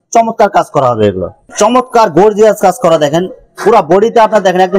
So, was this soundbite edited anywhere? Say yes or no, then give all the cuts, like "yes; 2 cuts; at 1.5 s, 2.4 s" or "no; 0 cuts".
yes; 1 cut; at 1.5 s